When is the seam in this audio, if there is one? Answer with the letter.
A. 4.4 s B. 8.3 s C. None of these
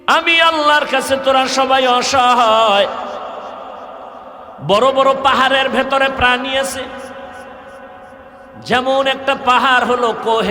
A